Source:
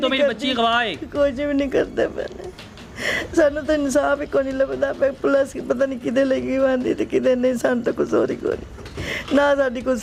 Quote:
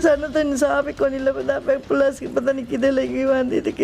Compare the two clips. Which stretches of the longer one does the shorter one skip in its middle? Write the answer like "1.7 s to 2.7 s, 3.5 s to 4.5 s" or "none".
none